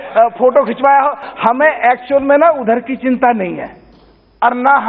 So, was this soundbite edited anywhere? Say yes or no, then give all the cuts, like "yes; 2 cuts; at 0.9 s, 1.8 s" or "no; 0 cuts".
yes; 1 cut; at 1.2 s